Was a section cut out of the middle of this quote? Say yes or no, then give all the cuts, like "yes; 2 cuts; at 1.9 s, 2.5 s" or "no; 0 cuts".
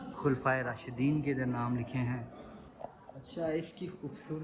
yes; 1 cut; at 2.7 s